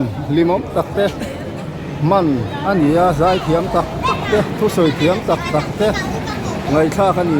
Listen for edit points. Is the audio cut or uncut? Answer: uncut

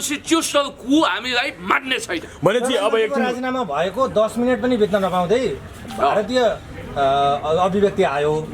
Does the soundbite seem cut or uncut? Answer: uncut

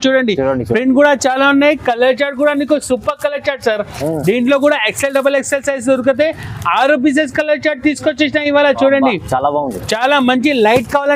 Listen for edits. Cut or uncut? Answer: uncut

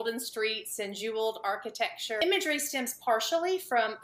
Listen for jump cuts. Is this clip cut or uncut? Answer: cut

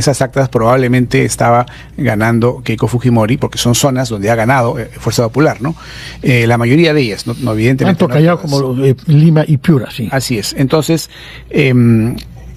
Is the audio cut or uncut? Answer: uncut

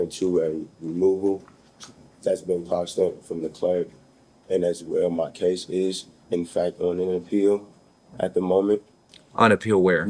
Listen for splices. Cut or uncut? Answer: uncut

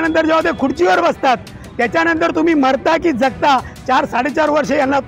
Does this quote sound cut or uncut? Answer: uncut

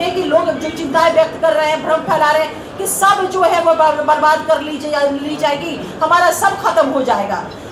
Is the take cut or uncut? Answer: uncut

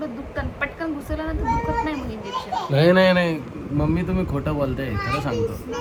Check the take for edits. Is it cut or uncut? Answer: uncut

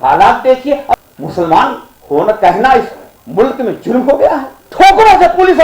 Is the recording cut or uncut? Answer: cut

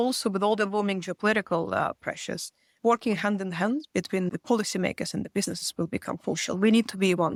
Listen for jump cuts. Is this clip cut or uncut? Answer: uncut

